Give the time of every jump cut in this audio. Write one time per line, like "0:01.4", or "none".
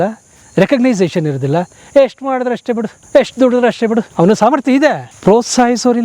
0:02.9
0:04.1
0:05.1